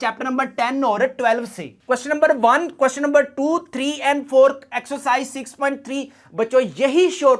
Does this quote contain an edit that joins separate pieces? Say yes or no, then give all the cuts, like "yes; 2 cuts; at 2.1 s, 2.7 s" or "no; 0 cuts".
yes; 1 cut; at 1.8 s